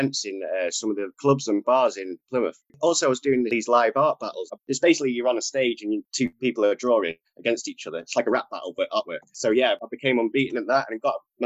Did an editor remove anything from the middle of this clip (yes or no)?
yes